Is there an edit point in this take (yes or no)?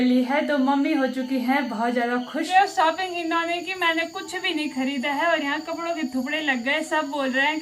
yes